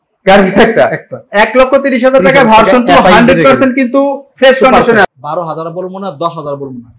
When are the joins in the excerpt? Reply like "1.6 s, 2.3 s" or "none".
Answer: 5.1 s